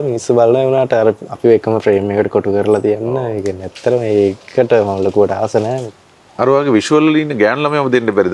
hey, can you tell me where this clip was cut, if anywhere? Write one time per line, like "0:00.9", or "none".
0:05.8